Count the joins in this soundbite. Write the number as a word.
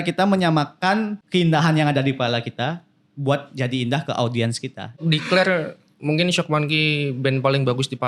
two